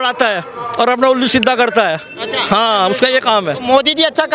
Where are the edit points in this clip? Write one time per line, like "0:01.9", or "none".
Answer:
none